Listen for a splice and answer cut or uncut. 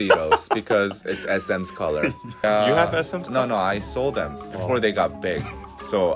cut